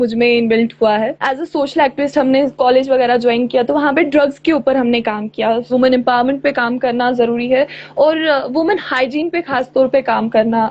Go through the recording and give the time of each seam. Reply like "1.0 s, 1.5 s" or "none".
1.2 s, 5.6 s